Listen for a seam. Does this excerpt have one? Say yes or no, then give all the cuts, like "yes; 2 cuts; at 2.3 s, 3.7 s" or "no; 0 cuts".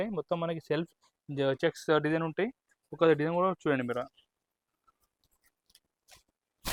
no; 0 cuts